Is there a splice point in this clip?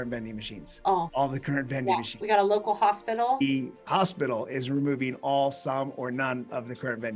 yes; 2 cuts; at 2.1 s, 3.4 s

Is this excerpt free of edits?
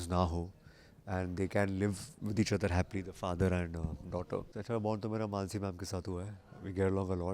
no; 1 cut; at 4.5 s

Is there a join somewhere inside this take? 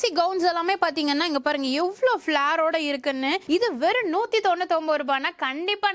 no; 0 cuts

